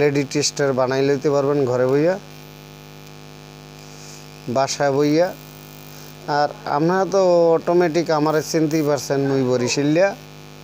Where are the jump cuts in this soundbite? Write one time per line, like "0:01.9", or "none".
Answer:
none